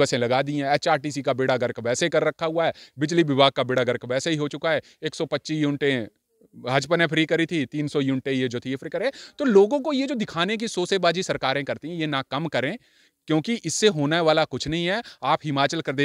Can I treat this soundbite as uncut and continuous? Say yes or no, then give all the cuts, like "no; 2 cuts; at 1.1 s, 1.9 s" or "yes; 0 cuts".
yes; 0 cuts